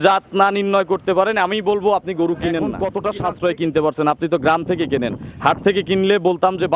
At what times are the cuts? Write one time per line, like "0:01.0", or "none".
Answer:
0:02.9